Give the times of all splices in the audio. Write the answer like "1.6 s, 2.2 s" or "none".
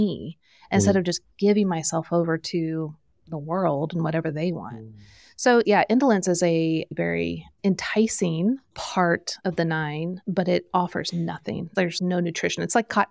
5.6 s, 9.3 s, 10.2 s